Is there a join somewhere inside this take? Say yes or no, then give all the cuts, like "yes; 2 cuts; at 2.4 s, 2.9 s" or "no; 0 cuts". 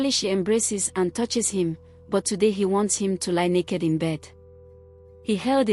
no; 0 cuts